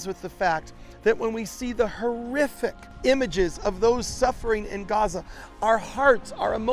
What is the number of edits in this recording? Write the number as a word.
one